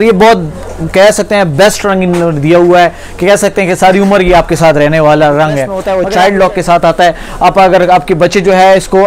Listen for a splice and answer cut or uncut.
cut